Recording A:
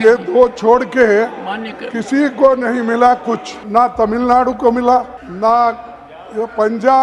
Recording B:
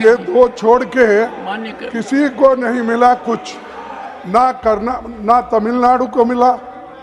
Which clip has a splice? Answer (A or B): A